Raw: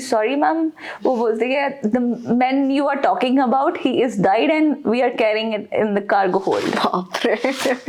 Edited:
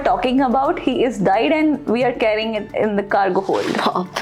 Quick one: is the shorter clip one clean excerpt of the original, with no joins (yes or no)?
yes